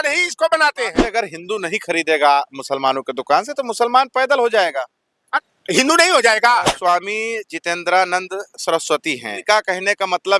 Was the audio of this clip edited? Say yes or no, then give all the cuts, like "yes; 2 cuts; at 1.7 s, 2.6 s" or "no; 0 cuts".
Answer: yes; 4 cuts; at 1.0 s, 5.2 s, 6.7 s, 9.3 s